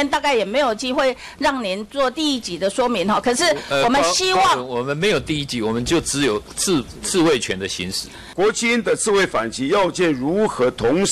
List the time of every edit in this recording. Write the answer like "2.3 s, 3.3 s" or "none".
8.2 s